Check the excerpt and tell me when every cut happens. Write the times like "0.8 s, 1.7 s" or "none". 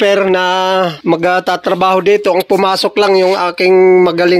1.0 s